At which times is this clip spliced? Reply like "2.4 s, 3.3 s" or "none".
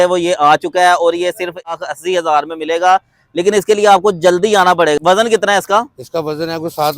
1.7 s, 5.0 s